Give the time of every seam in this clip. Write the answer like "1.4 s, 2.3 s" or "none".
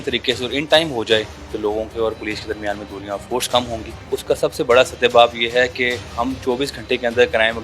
1.4 s, 3.9 s, 6.1 s